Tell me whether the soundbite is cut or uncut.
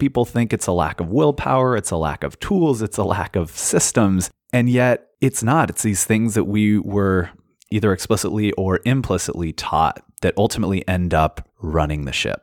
cut